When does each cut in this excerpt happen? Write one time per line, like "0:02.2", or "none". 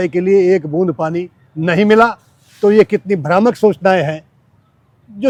none